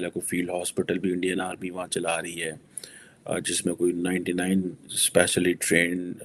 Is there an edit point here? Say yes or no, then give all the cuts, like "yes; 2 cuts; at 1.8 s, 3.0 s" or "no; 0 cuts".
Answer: no; 0 cuts